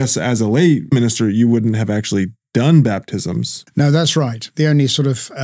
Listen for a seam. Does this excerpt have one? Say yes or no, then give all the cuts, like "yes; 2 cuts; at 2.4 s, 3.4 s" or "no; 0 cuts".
yes; 3 cuts; at 0.9 s, 3.6 s, 4.5 s